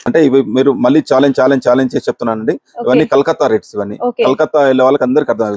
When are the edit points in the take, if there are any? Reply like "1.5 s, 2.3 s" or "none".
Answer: none